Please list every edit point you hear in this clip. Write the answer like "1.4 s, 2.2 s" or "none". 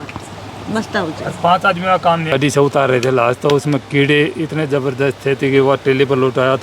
2.3 s